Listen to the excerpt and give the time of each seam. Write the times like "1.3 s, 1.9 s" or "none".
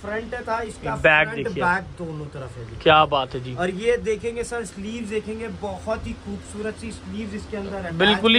none